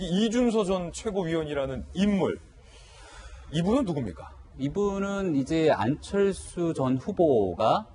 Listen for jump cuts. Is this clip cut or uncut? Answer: cut